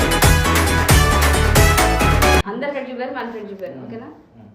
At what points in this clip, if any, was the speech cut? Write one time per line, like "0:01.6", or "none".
0:02.5